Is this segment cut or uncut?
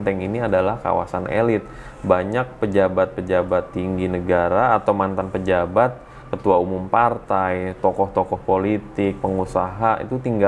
uncut